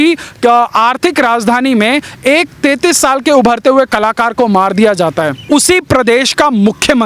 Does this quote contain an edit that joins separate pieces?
yes; 1 cut; at 5.4 s

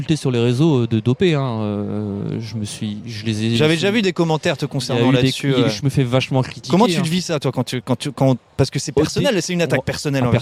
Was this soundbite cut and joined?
no; 0 cuts

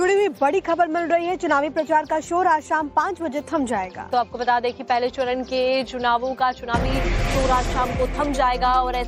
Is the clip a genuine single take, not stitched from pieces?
no; 1 cut; at 5.0 s

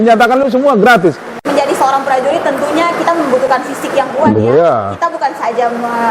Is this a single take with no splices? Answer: no; 1 cut; at 1.4 s

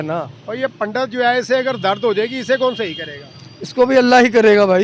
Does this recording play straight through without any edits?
yes; 0 cuts

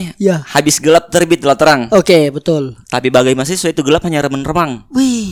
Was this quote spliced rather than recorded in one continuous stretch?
no; 0 cuts

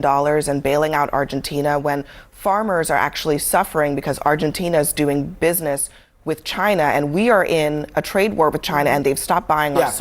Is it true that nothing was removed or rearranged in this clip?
no; 1 cut; at 7.2 s

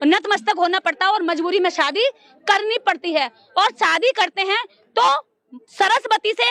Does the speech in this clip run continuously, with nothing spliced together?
yes; 0 cuts

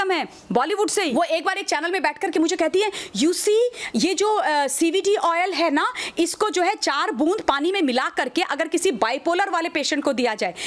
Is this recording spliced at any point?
yes; 1 cut; at 1.1 s

